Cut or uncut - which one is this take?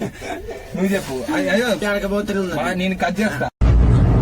cut